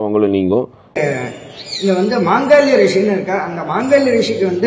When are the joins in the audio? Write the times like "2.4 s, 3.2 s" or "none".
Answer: 1.0 s